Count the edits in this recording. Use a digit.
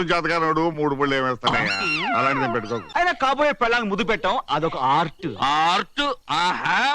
1